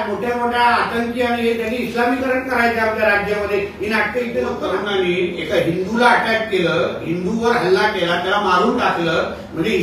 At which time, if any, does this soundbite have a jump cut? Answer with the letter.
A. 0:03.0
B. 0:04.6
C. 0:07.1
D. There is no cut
B